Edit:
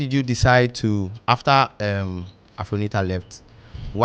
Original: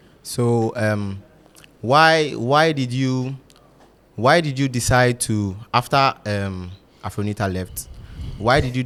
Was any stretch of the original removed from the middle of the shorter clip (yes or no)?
no